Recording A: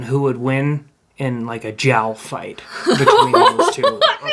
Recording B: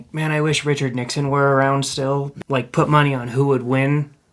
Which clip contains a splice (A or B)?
B